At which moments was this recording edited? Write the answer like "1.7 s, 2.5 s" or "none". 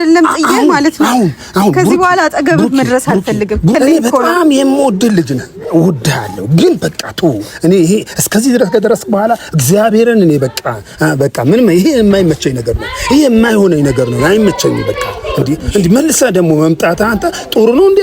3.7 s